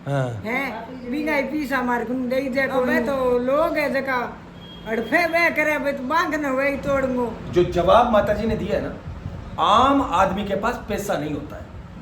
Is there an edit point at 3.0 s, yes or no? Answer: yes